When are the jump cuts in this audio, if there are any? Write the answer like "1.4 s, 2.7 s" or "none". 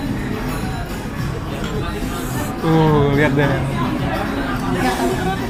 none